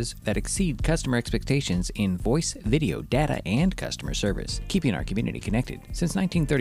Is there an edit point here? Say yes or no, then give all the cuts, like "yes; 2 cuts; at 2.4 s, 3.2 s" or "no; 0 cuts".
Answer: no; 0 cuts